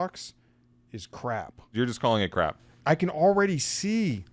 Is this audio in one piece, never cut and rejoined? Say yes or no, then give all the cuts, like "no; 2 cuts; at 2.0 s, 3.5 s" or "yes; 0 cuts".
no; 2 cuts; at 1.6 s, 2.7 s